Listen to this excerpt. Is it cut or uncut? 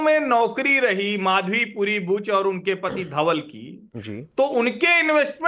cut